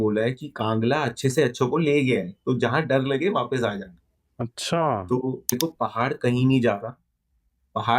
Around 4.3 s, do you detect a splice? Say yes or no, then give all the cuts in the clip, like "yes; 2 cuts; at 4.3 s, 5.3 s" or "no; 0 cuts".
no; 1 cut; at 5.6 s